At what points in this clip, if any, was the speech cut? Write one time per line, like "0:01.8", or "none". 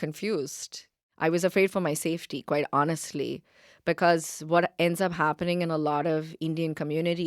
0:01.0